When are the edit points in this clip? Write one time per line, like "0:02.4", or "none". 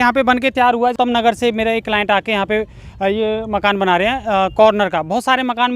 0:00.9

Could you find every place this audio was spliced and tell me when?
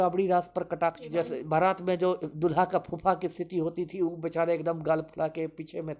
0:01.0

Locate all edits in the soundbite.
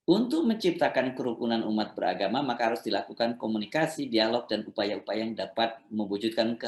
none

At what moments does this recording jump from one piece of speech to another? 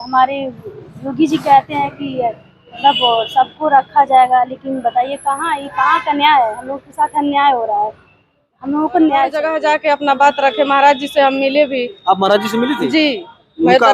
0:09.5

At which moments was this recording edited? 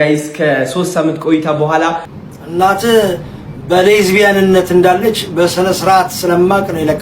0:02.1

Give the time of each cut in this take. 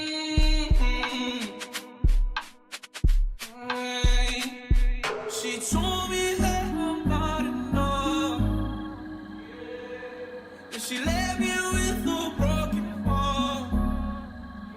0:05.3

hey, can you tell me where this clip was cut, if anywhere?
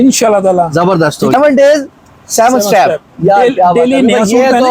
0:01.3

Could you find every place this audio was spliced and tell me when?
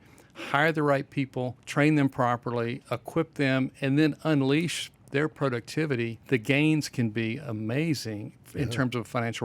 0:01.6
0:06.2

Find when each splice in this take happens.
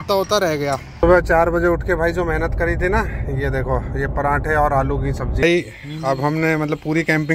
0:01.0
0:05.4

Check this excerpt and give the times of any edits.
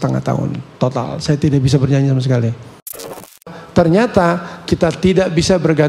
0:03.3

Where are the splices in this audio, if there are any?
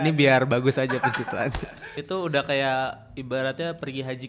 0:01.9

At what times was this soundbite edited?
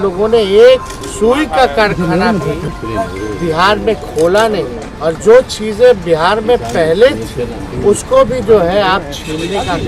0:01.0
0:02.7
0:04.8
0:07.6

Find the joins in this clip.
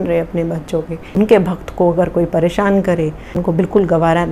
0:01.3
0:03.4

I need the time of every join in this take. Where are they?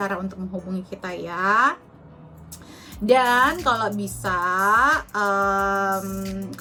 none

